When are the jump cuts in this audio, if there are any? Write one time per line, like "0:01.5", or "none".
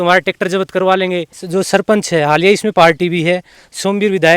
0:01.4